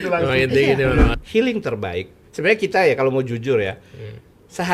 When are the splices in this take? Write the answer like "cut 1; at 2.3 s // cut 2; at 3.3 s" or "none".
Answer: cut 1; at 1.1 s